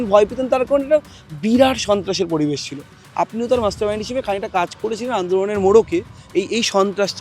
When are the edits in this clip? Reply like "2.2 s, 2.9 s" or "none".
3.0 s